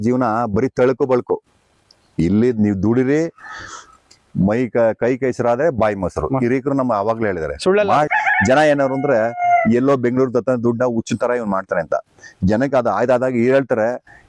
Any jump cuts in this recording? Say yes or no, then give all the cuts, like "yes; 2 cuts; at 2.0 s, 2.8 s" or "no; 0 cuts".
yes; 1 cut; at 8.1 s